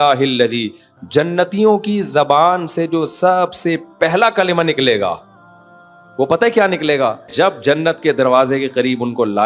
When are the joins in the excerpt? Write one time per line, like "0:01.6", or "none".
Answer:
0:07.3